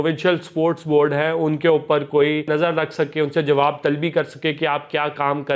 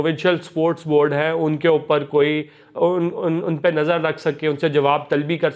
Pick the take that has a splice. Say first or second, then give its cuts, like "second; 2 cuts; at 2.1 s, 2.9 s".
first; 1 cut; at 2.5 s